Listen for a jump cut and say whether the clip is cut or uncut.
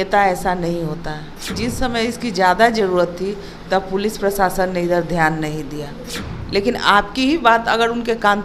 cut